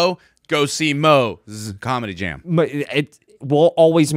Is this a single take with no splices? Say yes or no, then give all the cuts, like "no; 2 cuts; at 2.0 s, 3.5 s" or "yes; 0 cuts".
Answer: yes; 0 cuts